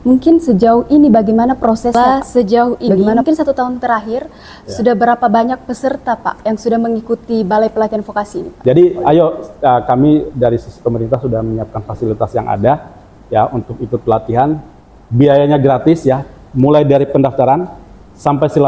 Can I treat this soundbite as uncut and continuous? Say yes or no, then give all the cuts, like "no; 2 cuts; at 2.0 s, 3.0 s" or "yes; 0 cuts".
no; 2 cuts; at 1.9 s, 8.6 s